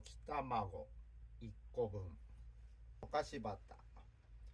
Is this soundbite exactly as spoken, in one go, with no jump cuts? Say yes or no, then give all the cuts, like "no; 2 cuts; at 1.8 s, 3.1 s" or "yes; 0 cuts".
no; 1 cut; at 3.0 s